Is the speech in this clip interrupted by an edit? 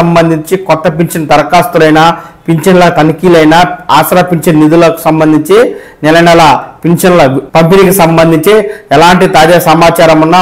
yes; 1 cut; at 7.4 s

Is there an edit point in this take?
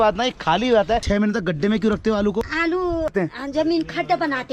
yes; 2 cuts; at 1.0 s, 3.1 s

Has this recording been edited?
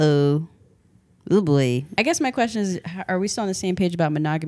yes; 1 cut; at 1.9 s

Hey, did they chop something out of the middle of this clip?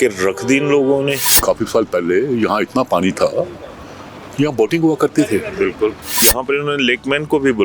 yes; 2 cuts; at 1.3 s, 6.1 s

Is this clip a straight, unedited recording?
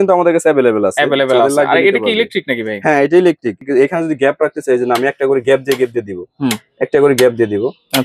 no; 1 cut; at 3.6 s

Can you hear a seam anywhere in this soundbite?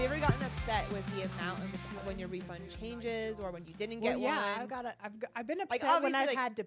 no; 0 cuts

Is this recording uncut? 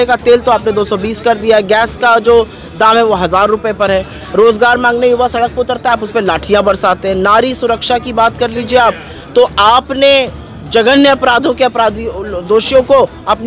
yes; 0 cuts

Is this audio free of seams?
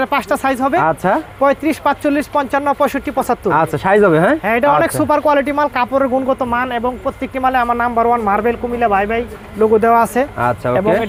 yes; 0 cuts

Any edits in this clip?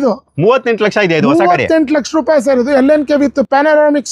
no; 0 cuts

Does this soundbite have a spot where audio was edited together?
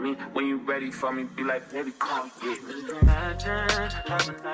no; 0 cuts

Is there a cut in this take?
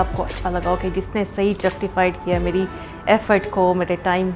no; 0 cuts

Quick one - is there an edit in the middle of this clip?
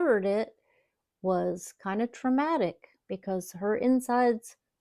no; 0 cuts

